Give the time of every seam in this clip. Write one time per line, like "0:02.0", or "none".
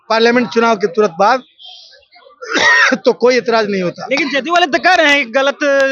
none

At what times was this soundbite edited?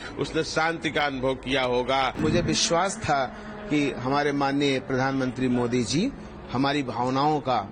0:02.2

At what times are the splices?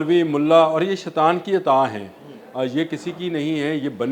none

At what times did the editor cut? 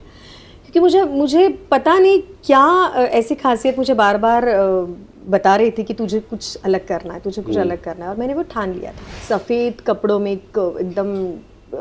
0:09.2

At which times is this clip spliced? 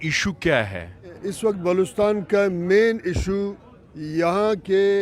0:01.2

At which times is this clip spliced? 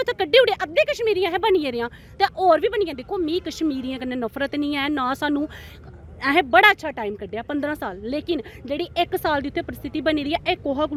none

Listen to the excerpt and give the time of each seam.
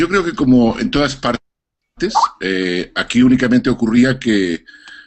0:01.0

